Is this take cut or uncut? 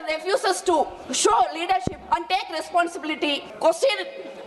cut